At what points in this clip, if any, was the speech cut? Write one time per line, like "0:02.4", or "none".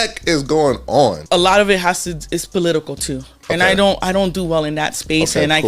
0:01.2